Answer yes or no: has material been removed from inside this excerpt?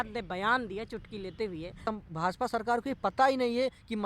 yes